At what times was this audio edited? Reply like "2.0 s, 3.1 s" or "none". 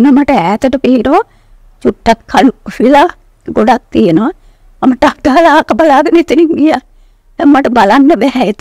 none